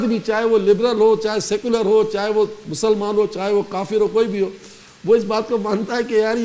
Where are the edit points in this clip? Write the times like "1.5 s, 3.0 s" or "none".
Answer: none